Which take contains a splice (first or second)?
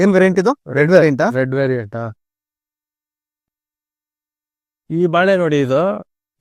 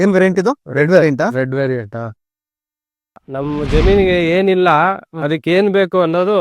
second